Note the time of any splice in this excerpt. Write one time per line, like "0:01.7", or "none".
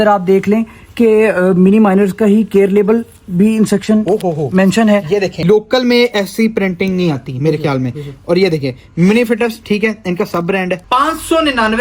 0:05.4
0:10.8